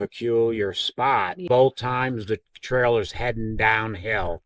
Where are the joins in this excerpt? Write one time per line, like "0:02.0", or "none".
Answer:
0:01.4